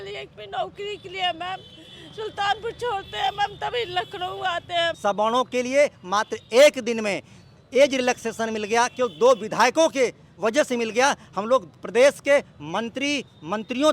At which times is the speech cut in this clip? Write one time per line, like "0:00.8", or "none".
0:05.0